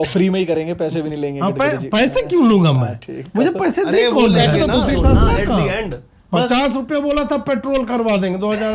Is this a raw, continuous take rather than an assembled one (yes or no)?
no